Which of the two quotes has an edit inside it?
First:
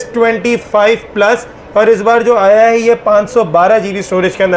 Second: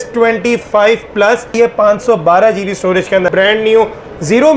second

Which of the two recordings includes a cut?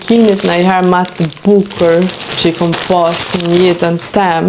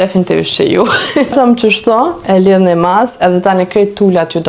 second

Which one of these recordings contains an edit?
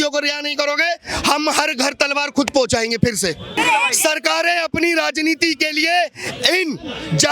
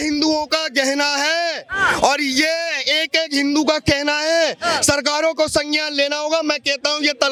first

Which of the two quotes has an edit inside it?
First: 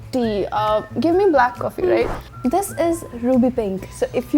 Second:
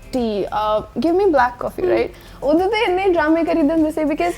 first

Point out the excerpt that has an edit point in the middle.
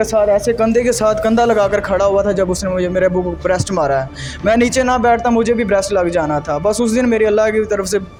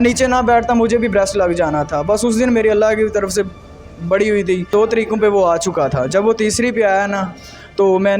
second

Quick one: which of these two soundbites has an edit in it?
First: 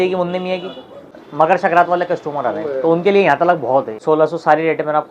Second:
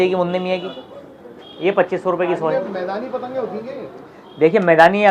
first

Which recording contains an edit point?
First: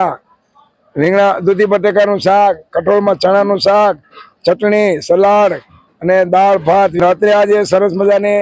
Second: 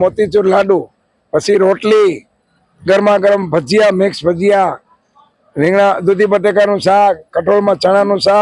first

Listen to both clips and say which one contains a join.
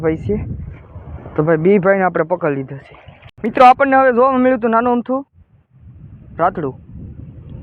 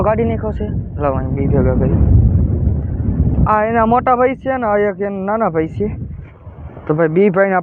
first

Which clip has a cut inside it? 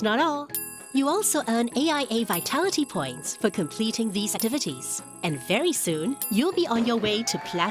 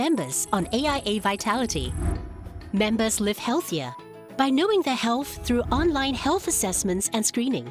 first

